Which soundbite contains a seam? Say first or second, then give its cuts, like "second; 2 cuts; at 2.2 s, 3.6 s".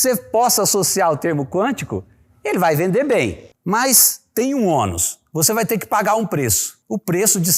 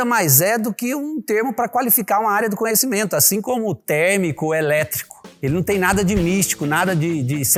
first; 1 cut; at 3.4 s